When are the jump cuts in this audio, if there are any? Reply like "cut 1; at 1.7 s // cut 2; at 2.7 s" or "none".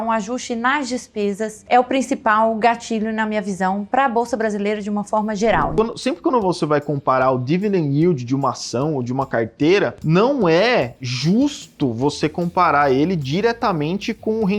cut 1; at 1.6 s // cut 2; at 5.7 s // cut 3; at 10.0 s

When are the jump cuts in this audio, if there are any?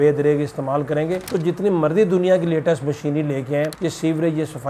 none

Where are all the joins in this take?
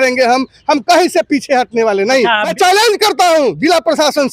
cut 1; at 2.5 s

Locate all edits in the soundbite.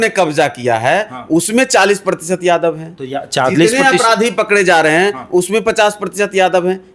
none

